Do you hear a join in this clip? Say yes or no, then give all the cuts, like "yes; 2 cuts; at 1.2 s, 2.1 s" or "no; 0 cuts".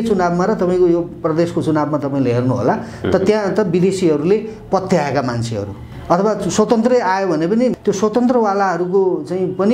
yes; 2 cuts; at 5.9 s, 7.8 s